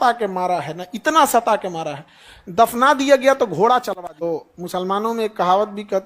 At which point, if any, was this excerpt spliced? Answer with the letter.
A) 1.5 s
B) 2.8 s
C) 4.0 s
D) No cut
C